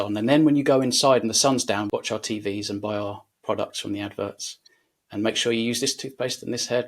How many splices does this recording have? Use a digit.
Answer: 1